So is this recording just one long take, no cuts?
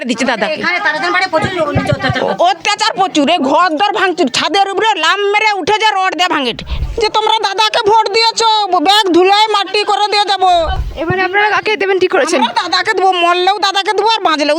no; 2 cuts; at 6.8 s, 10.8 s

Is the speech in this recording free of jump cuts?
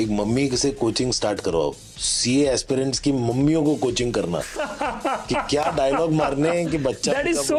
yes; 0 cuts

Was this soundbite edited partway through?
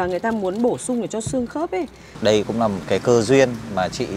yes; 2 cuts; at 2.0 s, 2.8 s

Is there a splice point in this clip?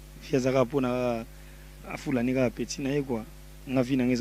no; 0 cuts

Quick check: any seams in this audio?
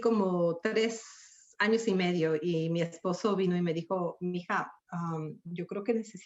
no; 0 cuts

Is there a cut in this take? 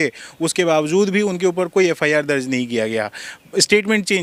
no; 0 cuts

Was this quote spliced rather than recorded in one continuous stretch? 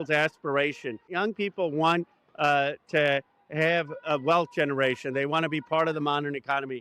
yes; 1 cut; at 1.1 s

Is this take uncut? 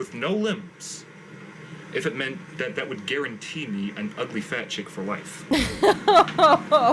no; 1 cut; at 5.5 s

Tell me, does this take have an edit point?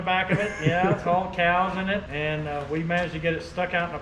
yes; 1 cut; at 2.1 s

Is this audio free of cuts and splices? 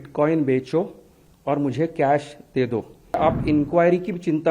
no; 1 cut; at 3.2 s

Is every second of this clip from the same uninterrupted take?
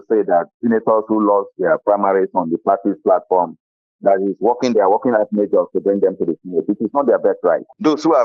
yes; 0 cuts

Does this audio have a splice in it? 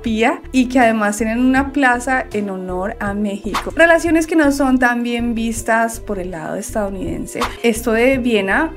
yes; 2 cuts; at 3.7 s, 7.6 s

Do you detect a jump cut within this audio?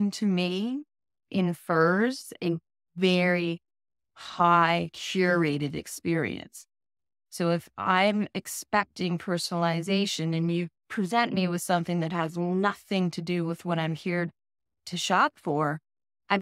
no; 0 cuts

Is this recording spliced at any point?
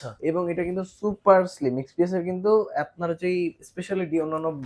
no; 0 cuts

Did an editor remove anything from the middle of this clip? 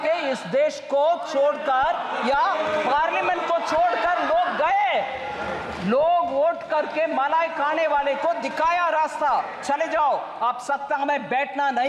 no; 0 cuts

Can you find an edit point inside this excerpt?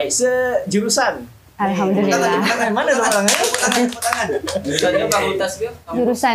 no; 0 cuts

